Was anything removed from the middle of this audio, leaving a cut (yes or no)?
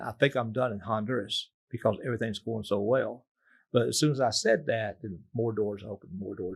no